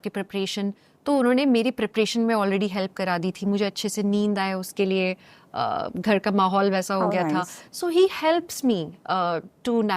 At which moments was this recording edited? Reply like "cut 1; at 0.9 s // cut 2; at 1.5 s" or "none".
none